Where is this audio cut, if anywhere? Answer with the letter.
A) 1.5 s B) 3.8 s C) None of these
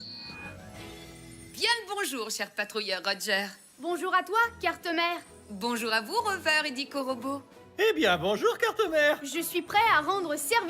A